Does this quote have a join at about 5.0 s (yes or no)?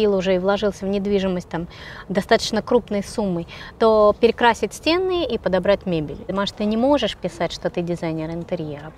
no